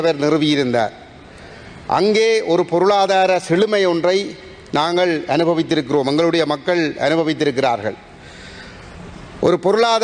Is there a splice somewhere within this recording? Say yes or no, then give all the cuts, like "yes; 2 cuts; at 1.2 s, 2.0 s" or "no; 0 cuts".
no; 0 cuts